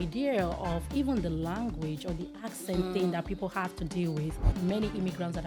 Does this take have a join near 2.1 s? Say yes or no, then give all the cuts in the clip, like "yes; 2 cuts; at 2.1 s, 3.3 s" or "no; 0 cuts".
no; 1 cut; at 4.5 s